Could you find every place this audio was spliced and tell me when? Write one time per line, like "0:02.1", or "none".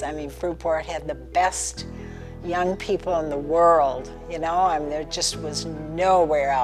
none